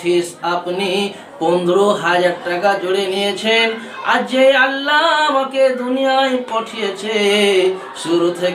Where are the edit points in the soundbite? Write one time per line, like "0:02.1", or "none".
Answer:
none